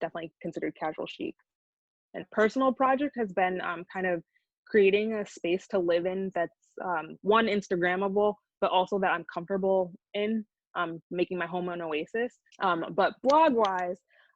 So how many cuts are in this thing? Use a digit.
2